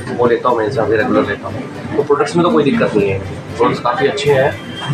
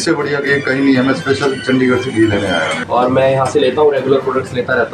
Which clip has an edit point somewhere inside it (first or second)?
second